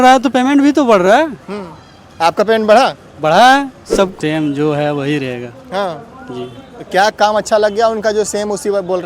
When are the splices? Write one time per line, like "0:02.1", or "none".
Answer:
0:04.1